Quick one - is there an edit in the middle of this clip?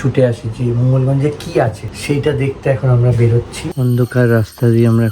yes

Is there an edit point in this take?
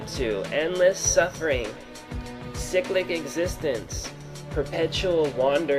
no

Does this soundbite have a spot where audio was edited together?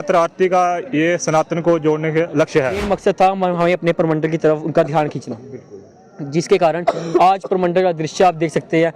yes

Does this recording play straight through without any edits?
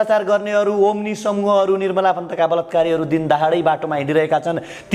yes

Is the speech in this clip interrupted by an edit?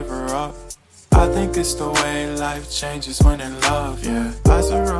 no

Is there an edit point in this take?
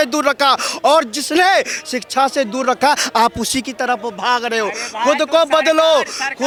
no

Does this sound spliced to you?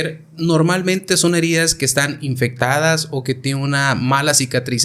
no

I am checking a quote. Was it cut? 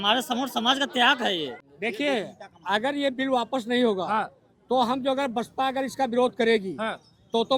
yes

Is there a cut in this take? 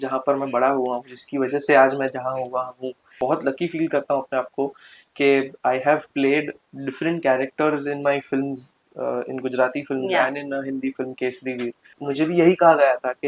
yes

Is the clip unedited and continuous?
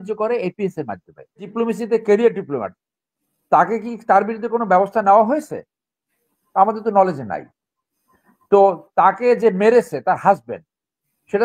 no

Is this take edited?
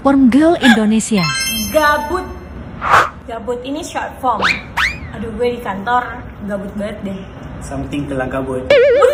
no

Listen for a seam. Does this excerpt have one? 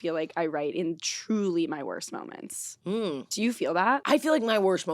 yes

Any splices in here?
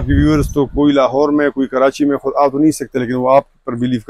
no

